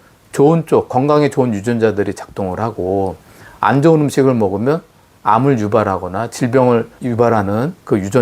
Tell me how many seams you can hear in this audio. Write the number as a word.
one